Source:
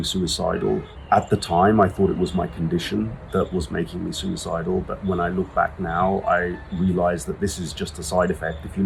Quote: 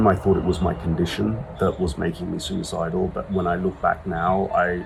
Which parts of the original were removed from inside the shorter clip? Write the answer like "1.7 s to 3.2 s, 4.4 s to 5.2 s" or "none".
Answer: none